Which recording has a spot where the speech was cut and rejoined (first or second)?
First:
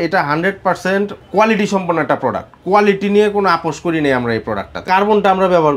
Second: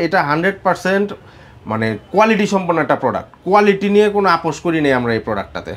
first